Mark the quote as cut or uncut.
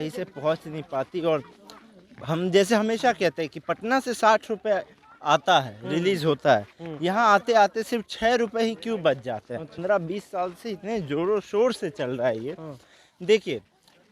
cut